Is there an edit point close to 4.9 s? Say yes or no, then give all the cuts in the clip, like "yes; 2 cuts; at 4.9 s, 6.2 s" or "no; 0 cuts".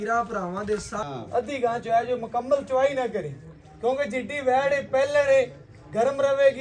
no; 1 cut; at 1.0 s